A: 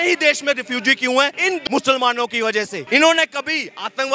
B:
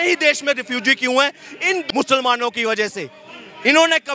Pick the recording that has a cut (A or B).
A